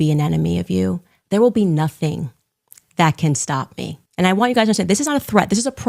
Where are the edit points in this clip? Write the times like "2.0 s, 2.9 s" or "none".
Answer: 1.1 s, 4.0 s